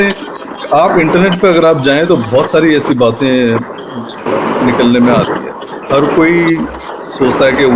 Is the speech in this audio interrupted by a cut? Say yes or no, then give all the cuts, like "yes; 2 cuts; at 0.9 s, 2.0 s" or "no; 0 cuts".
no; 0 cuts